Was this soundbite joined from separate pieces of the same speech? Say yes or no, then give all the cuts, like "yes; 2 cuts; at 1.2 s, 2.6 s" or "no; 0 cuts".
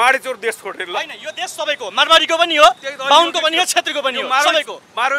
no; 0 cuts